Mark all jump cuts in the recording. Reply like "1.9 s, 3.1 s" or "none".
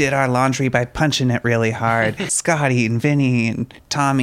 2.3 s